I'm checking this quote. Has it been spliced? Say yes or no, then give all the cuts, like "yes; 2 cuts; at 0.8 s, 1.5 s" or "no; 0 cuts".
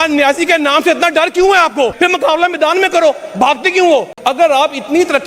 yes; 2 cuts; at 1.9 s, 4.1 s